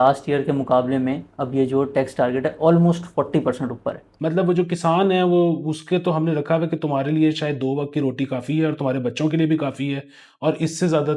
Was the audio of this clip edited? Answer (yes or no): yes